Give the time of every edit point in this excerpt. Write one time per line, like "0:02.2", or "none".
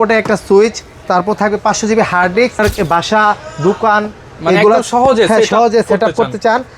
0:02.6